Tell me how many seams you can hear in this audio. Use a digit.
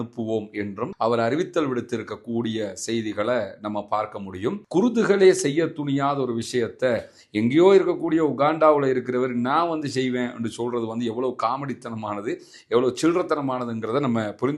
1